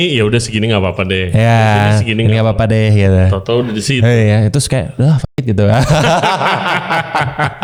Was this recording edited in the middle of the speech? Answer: no; 0 cuts

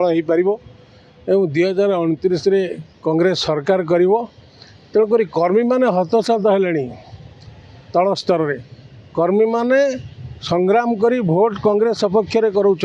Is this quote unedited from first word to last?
yes; 0 cuts

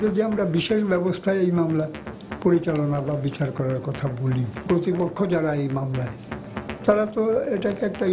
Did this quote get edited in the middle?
yes; 1 cut; at 4.6 s

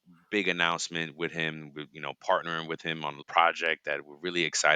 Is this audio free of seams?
no; 1 cut; at 3.2 s

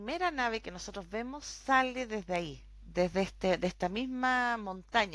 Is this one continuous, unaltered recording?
yes; 0 cuts

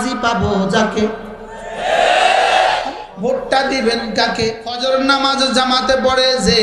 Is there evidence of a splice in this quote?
yes; 2 cuts; at 3.0 s, 4.8 s

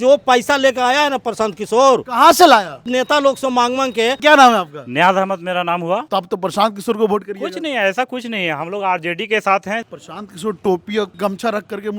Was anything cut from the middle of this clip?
yes; 5 cuts; at 2.9 s, 4.2 s, 6.0 s, 9.9 s, 11.1 s

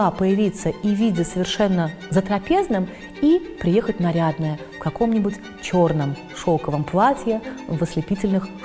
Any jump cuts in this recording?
no; 0 cuts

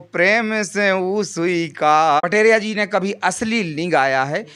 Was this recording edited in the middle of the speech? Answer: yes; 1 cut; at 2.2 s

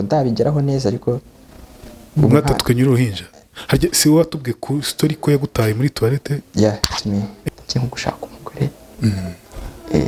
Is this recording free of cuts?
no; 2 cuts; at 6.4 s, 7.4 s

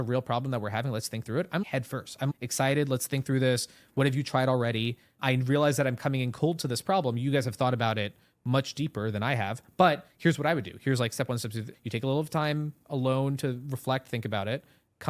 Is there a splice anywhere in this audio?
yes; 3 cuts; at 2.1 s, 5.2 s, 11.7 s

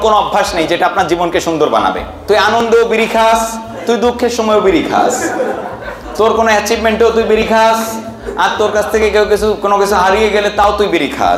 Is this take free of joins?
no; 1 cut; at 2.1 s

